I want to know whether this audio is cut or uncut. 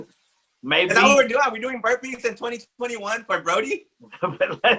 uncut